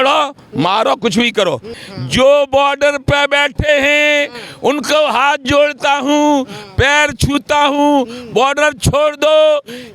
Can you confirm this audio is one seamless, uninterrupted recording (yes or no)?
no